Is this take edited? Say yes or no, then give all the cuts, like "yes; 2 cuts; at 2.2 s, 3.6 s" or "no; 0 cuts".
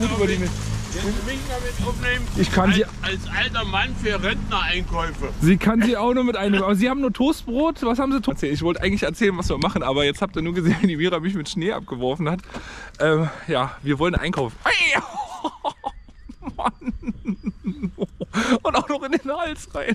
yes; 1 cut; at 8.3 s